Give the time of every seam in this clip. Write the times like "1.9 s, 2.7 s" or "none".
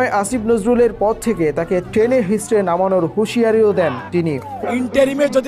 4.5 s